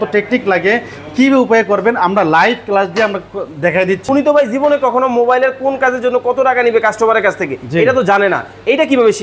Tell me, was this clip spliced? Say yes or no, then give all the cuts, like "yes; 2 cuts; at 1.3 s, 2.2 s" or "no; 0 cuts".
yes; 1 cut; at 4.0 s